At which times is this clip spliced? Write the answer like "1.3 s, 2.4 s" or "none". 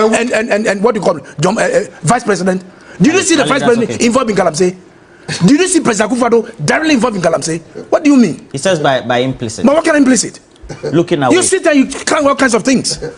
none